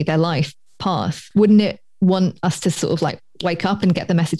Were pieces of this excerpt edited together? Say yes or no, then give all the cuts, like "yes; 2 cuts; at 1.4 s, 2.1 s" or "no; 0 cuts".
yes; 1 cut; at 1.2 s